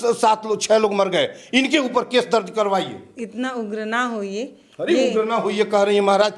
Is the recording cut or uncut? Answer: uncut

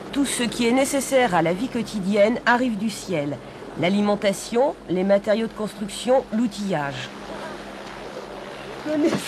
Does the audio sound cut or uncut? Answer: uncut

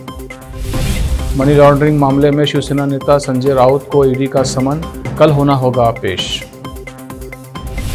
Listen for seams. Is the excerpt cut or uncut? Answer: uncut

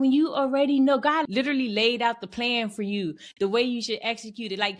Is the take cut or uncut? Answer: cut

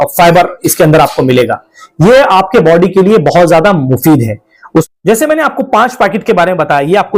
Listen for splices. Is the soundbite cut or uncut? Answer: uncut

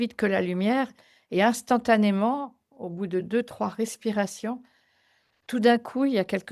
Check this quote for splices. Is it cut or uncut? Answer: uncut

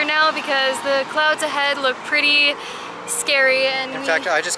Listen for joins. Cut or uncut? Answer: uncut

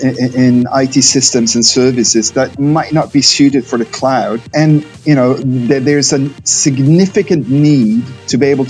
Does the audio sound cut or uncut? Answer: cut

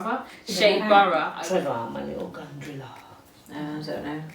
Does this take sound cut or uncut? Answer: cut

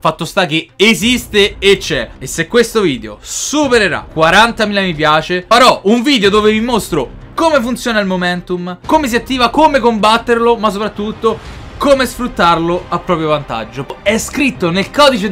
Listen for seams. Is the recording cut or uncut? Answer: cut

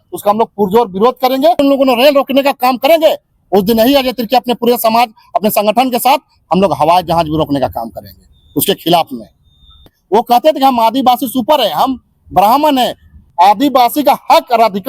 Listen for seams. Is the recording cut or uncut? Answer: cut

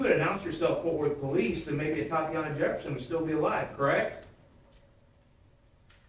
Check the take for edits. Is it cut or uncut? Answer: uncut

